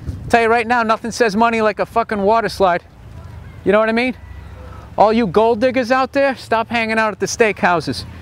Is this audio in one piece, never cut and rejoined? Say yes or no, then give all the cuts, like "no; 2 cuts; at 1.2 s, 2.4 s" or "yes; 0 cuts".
yes; 0 cuts